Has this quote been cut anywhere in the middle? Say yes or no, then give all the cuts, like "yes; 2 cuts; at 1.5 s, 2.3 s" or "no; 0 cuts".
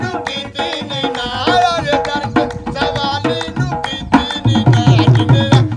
no; 0 cuts